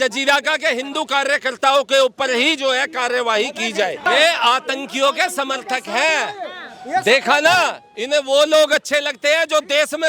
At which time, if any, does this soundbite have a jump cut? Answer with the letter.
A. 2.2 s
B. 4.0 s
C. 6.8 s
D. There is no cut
B